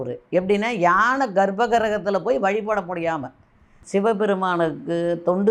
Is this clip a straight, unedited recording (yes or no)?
no